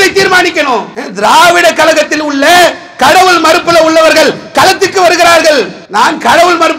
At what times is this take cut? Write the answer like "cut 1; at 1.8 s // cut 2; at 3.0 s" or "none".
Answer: cut 1; at 1.0 s // cut 2; at 5.8 s